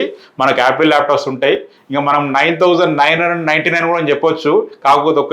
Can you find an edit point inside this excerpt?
no; 0 cuts

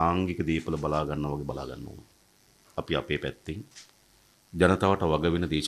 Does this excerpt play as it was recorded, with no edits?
no; 1 cut; at 2.5 s

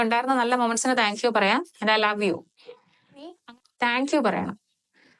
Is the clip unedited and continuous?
no; 1 cut; at 3.4 s

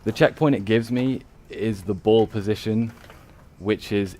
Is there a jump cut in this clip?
yes; 1 cut; at 2.4 s

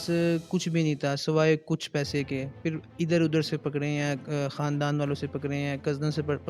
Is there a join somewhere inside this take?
no; 0 cuts

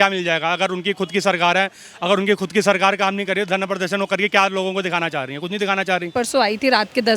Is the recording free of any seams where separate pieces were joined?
no; 1 cut; at 6.1 s

